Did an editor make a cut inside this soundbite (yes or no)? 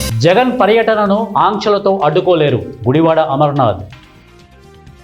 yes